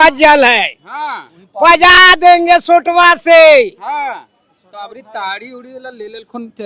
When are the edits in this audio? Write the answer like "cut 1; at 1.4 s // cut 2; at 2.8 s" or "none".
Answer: none